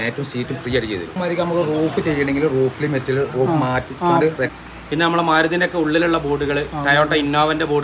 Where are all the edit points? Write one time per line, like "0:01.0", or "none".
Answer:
0:01.2
0:04.6